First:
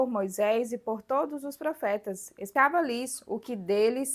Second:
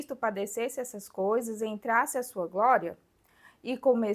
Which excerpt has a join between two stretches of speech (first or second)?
first